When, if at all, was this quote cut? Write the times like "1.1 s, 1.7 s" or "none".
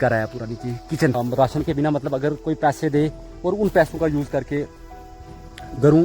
1.1 s